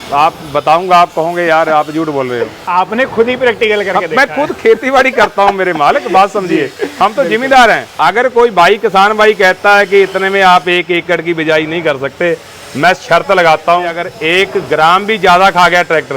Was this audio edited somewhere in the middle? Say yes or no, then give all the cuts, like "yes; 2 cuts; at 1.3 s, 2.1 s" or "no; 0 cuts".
yes; 3 cuts; at 2.6 s, 7.9 s, 14.0 s